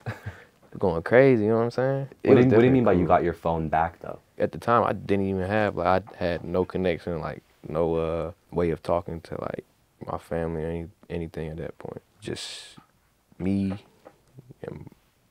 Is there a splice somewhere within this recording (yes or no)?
yes